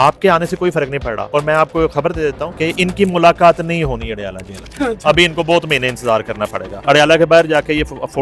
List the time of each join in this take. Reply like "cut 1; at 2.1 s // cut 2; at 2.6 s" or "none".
cut 1; at 1.2 s // cut 2; at 2.5 s // cut 3; at 6.7 s